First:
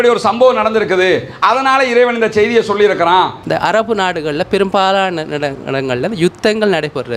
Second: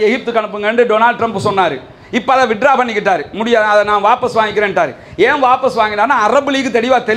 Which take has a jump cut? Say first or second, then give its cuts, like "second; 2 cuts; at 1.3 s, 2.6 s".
first; 1 cut; at 3.4 s